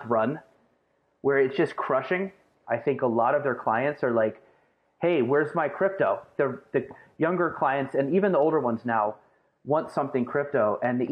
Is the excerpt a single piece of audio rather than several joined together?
no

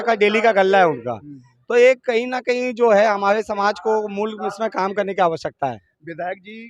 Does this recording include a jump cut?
no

